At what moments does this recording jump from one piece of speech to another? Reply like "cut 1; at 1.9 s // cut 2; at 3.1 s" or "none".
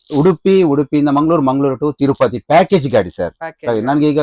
none

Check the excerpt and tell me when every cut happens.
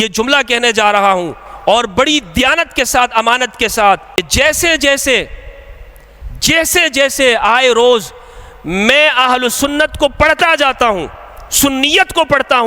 cut 1; at 4.1 s

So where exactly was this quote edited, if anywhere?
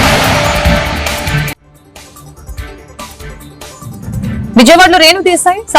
cut 1; at 3.7 s

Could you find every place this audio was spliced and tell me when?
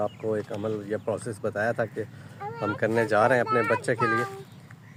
none

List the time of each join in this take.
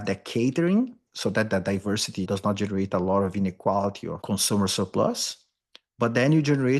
cut 1; at 1.1 s // cut 2; at 4.1 s

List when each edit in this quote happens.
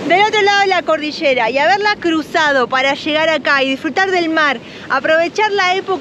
none

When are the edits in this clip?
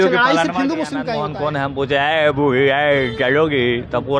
cut 1; at 1.1 s

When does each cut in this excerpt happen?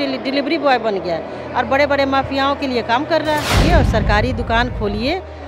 cut 1; at 3.6 s

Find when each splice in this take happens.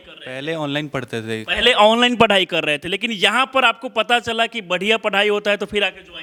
none

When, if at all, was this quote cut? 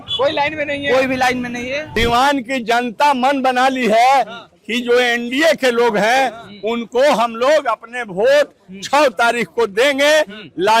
cut 1; at 1.8 s

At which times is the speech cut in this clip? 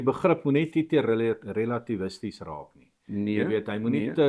none

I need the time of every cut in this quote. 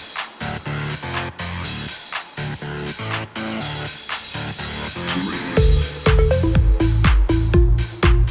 cut 1; at 7.1 s

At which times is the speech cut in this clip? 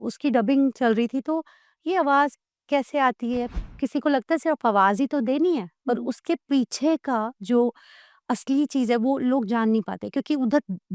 cut 1; at 3.5 s

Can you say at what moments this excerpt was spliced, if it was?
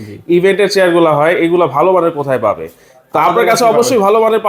none

